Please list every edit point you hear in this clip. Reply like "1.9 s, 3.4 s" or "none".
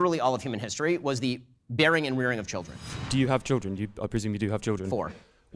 2.7 s